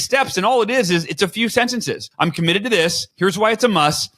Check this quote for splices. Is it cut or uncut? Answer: cut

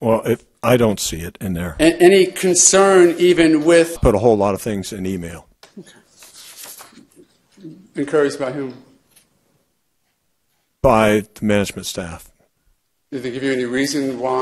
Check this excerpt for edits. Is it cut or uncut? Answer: uncut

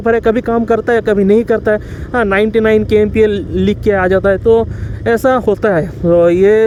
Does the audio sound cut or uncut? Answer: uncut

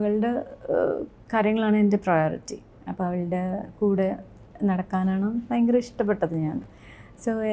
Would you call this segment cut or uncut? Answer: uncut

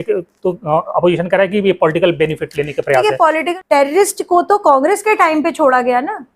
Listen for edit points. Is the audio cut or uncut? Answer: cut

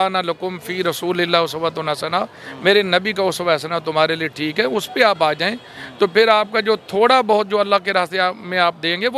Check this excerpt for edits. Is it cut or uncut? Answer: uncut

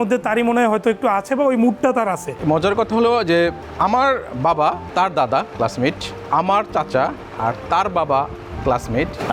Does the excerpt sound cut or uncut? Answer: cut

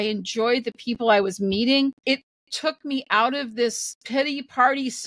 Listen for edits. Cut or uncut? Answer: cut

